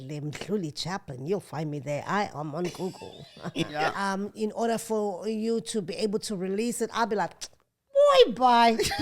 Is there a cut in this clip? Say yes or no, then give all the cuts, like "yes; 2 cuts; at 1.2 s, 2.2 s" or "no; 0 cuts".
yes; 1 cut; at 3.9 s